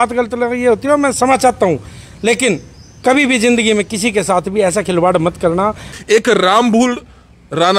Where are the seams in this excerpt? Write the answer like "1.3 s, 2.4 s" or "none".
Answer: 6.0 s